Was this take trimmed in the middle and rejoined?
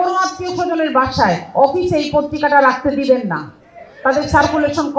no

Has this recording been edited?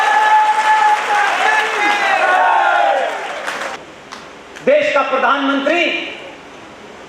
yes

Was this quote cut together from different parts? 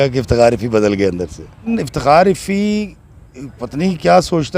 yes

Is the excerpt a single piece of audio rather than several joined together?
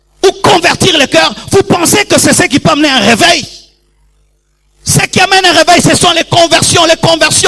yes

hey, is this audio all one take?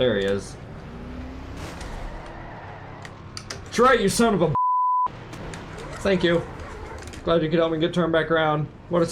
yes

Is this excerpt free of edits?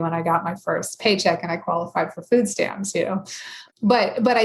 no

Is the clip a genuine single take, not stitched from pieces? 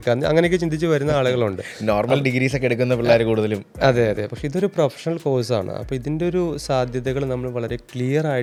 yes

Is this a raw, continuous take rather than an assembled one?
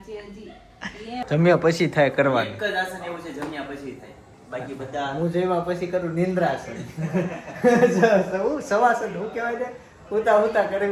no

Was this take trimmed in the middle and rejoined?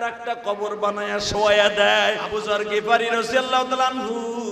yes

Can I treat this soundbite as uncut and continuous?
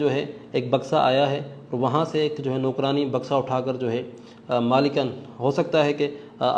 yes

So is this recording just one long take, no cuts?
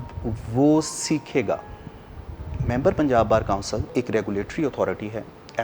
no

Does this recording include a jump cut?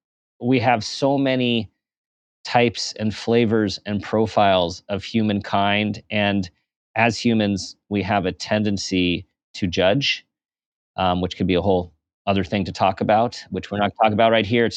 no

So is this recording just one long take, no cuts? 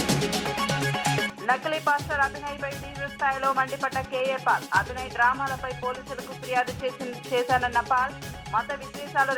yes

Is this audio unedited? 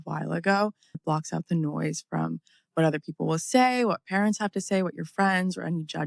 no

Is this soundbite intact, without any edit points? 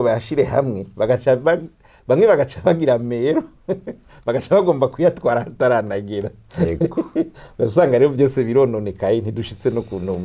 yes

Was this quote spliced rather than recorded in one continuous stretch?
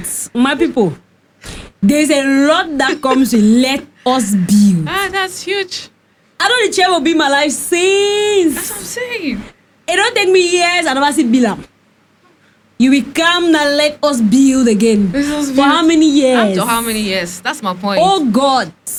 no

